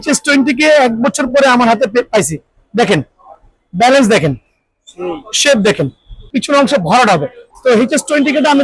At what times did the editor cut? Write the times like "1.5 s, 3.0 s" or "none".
6.3 s, 7.4 s